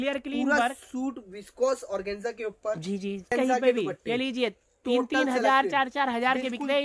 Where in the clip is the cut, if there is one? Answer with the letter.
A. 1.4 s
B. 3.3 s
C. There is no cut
B